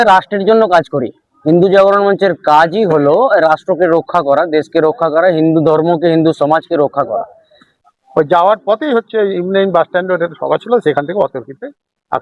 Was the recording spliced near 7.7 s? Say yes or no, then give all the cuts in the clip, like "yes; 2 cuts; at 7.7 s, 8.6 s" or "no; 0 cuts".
yes; 1 cut; at 7.7 s